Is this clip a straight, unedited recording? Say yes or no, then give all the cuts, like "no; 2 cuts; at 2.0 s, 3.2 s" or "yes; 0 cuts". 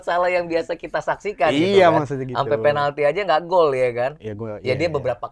yes; 0 cuts